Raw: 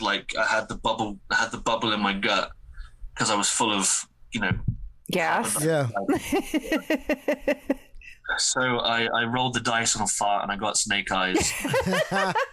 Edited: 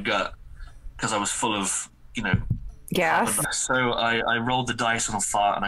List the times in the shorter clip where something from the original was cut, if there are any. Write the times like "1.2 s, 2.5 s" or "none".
3.4 s